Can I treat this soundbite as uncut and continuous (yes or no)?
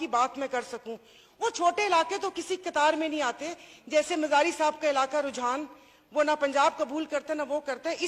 yes